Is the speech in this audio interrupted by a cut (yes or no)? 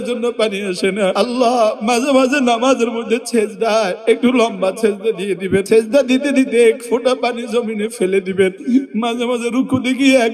yes